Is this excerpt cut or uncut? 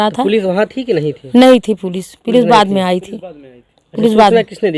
uncut